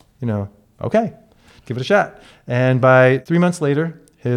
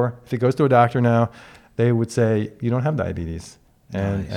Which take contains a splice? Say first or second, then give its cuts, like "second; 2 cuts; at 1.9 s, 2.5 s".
first; 1 cut; at 3.2 s